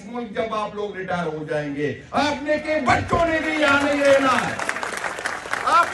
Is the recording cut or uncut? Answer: uncut